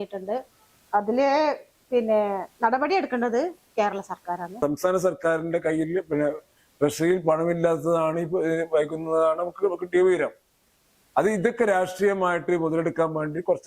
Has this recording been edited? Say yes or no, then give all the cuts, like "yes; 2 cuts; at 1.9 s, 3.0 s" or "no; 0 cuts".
yes; 1 cut; at 4.6 s